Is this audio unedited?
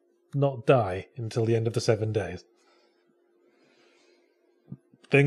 yes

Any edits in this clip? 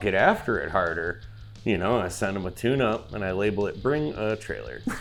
no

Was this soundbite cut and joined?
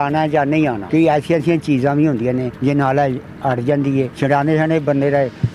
yes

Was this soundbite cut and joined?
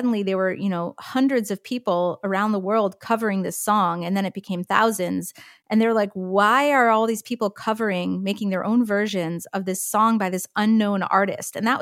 no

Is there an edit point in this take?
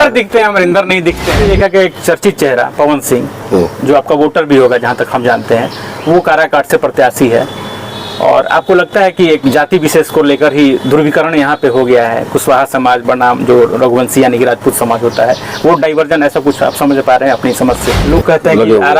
yes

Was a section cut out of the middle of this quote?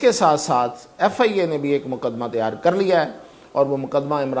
no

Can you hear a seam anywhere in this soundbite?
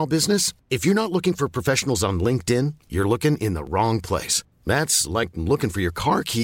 no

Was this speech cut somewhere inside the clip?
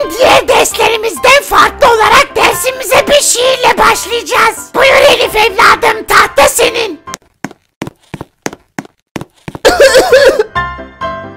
yes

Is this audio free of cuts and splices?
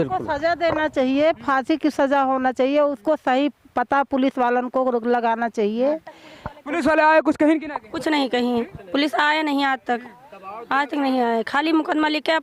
yes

